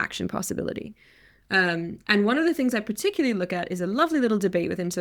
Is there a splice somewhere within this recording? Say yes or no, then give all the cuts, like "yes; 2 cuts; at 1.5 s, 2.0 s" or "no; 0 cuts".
no; 0 cuts